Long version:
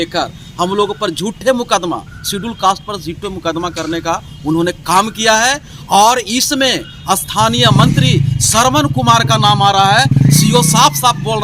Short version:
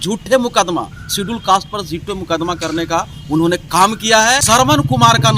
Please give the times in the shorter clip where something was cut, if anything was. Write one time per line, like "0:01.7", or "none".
0:04.4